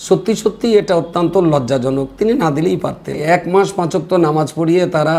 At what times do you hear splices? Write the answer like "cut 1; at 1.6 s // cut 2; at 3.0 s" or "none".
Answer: cut 1; at 3.2 s